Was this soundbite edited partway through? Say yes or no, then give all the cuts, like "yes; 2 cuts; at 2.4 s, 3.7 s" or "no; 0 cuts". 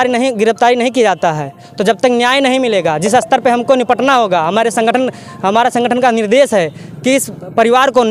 no; 0 cuts